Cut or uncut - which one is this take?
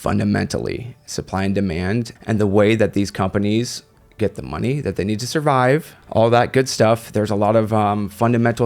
cut